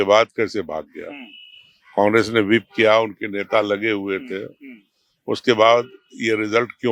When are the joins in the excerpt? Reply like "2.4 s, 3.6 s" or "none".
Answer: none